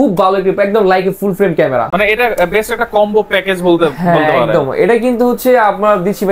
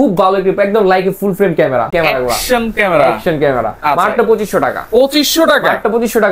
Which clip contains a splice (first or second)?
second